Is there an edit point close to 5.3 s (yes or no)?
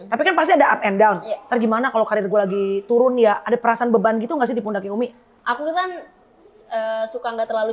yes